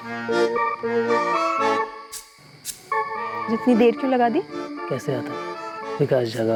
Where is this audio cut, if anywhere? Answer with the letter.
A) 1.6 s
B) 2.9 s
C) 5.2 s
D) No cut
D